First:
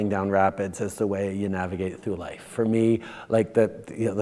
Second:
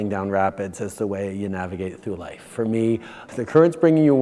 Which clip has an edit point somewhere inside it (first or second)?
second